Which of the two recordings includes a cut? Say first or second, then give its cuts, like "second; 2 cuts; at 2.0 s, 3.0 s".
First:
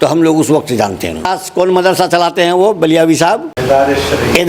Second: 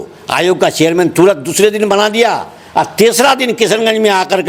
first; 2 cuts; at 1.3 s, 3.5 s